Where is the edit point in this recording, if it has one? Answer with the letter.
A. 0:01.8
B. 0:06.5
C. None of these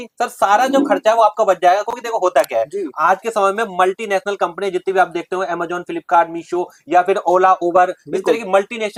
C